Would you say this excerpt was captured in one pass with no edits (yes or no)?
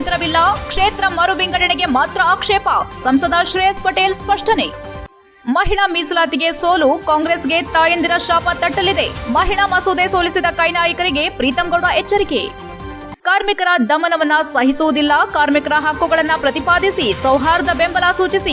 yes